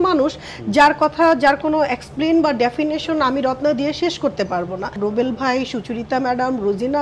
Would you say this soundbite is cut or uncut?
cut